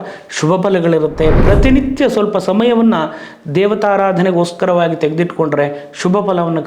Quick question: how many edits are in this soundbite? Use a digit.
1